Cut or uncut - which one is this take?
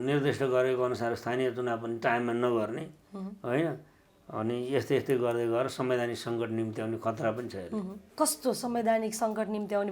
uncut